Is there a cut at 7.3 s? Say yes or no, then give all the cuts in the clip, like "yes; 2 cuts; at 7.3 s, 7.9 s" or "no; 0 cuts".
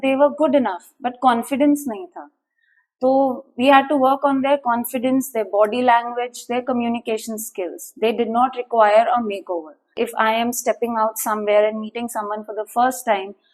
no; 1 cut; at 9.9 s